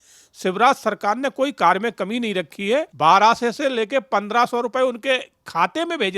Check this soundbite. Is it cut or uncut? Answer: cut